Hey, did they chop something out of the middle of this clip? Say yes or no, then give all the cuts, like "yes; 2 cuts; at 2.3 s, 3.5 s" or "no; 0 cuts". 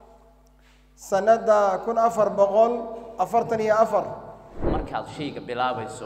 yes; 1 cut; at 4.7 s